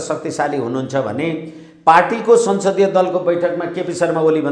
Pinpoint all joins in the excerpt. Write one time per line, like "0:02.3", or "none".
none